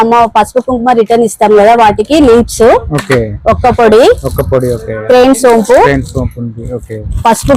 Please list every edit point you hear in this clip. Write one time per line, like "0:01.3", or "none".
none